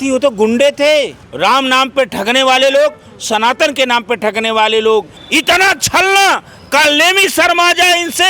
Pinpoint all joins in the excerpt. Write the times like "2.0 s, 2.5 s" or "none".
1.2 s, 5.2 s